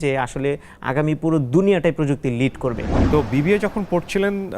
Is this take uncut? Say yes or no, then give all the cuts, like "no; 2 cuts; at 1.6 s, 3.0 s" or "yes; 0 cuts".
no; 1 cut; at 2.9 s